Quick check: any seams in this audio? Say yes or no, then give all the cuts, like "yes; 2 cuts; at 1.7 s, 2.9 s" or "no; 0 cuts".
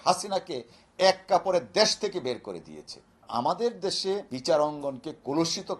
yes; 2 cuts; at 3.2 s, 4.3 s